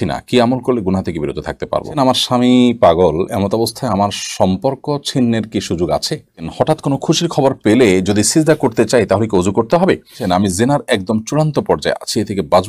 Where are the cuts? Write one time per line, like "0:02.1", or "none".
0:01.9
0:06.5
0:10.2

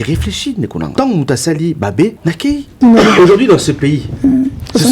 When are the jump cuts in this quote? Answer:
0:00.9
0:02.8

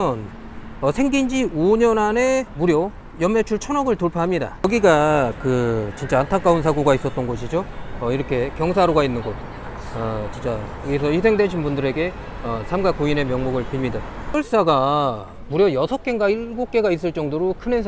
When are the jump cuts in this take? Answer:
none

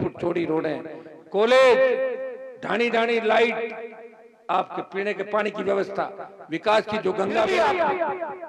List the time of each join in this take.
0:07.5

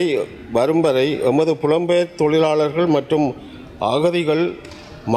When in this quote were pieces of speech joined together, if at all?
none

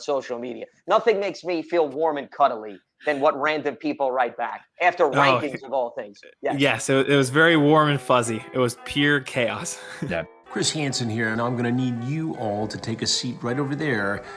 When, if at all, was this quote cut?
0:10.3

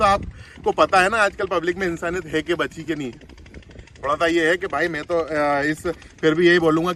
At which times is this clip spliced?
none

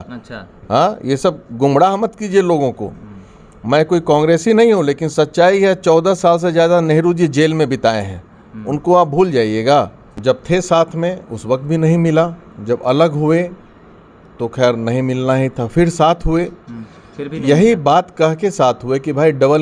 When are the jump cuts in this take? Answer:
0:10.0

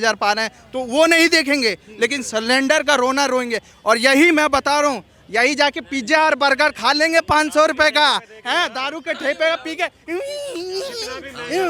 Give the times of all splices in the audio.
none

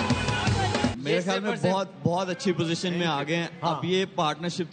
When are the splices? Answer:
0:01.0

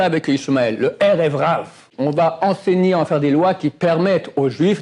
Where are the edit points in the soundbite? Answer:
0:01.9

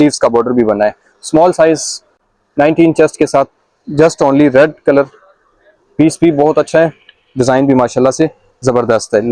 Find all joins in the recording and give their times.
none

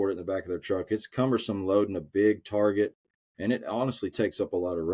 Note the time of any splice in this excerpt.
none

